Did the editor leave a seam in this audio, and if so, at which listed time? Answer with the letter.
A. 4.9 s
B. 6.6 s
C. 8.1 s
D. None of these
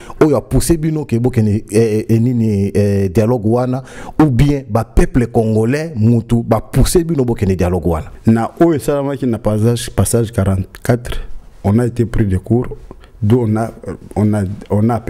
C